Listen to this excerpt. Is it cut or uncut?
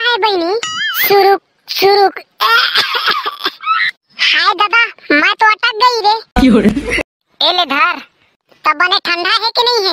cut